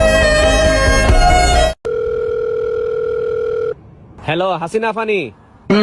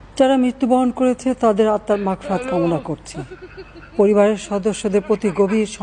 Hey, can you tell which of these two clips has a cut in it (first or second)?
first